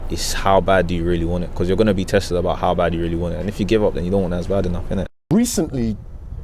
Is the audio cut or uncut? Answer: cut